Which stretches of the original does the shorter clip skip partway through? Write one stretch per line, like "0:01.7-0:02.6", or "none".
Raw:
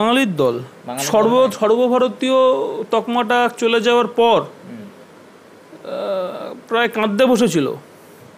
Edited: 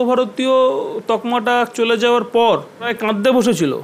0:04.8-0:06.9

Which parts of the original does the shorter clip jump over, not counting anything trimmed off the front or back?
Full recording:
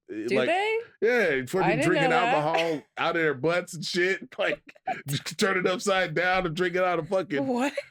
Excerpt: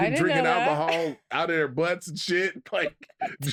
none

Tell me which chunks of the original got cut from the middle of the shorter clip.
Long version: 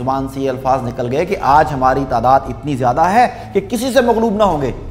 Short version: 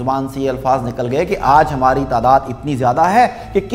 none

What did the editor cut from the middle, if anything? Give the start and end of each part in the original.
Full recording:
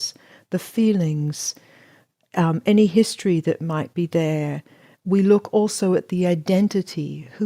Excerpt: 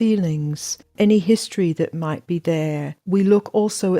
0:01.7-0:02.6
0:04.6-0:04.9

